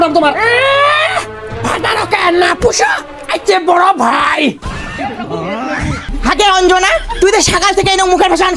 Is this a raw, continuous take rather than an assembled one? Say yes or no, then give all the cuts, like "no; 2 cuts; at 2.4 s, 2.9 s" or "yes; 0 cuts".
no; 1 cut; at 6.1 s